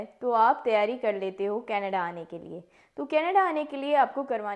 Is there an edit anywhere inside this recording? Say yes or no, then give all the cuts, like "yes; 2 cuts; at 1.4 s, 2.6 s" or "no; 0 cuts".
no; 0 cuts